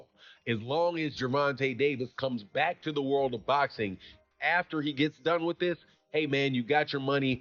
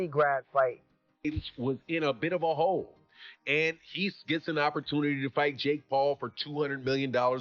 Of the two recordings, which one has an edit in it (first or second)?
second